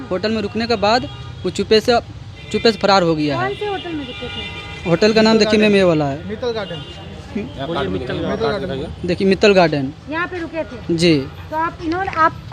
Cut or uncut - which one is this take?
uncut